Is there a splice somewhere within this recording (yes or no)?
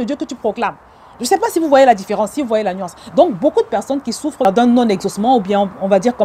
yes